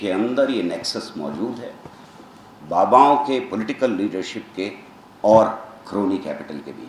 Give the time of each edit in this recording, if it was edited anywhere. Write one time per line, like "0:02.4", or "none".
none